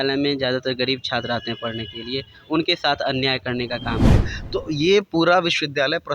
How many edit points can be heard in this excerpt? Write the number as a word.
one